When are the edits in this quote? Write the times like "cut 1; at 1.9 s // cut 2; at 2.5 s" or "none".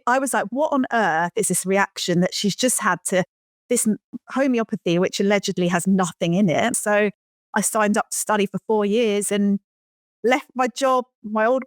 cut 1; at 6.7 s